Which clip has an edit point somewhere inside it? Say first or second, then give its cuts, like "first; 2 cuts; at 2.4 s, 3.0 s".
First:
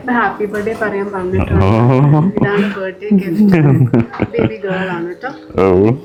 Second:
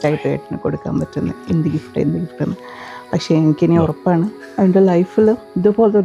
second; 1 cut; at 4.4 s